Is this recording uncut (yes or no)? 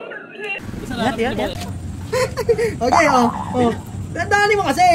no